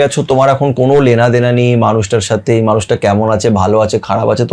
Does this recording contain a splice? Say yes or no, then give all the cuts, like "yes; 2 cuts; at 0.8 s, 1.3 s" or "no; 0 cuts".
no; 0 cuts